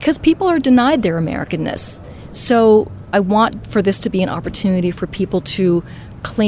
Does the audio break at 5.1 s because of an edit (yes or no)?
no